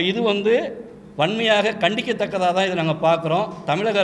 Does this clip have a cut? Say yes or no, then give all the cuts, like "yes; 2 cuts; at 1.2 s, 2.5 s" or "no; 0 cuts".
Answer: no; 0 cuts